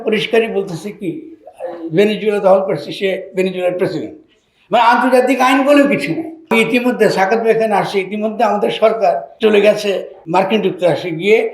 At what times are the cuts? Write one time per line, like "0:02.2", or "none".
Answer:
0:06.5
0:09.3
0:10.2